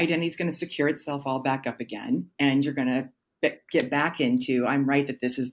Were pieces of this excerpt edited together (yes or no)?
no